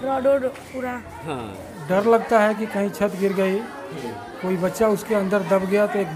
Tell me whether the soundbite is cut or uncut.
cut